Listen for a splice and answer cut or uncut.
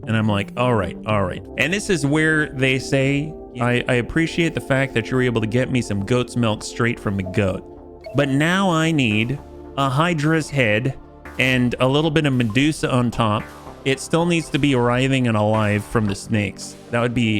cut